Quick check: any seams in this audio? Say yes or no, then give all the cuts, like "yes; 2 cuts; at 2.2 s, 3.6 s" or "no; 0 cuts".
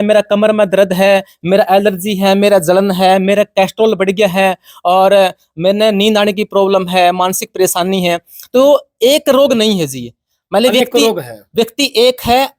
no; 0 cuts